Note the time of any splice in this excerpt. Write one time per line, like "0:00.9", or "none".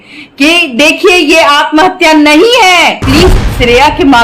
0:03.0